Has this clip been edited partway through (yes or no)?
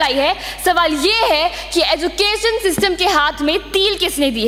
no